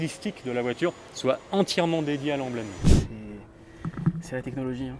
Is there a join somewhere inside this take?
yes; 1 cut; at 2.7 s

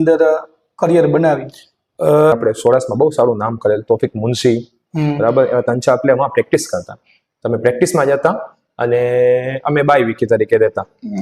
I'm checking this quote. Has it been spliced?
yes; 1 cut; at 2.3 s

